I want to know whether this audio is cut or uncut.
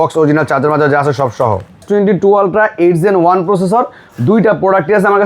cut